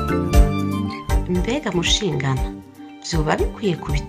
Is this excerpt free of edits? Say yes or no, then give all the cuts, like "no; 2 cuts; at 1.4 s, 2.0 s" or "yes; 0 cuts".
no; 1 cut; at 1.2 s